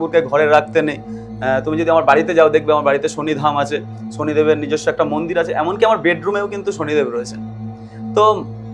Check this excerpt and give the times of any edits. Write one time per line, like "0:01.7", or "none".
none